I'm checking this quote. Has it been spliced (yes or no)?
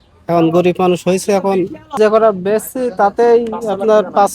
yes